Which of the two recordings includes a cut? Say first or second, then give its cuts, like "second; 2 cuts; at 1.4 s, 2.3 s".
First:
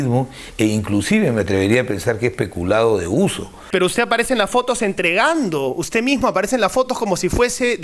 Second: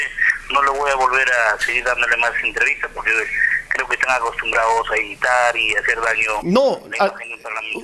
first; 1 cut; at 3.4 s